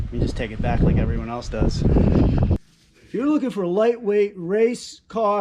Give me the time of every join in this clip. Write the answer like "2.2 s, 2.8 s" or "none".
2.5 s